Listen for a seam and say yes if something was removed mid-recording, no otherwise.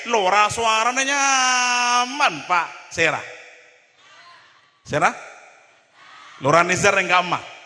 no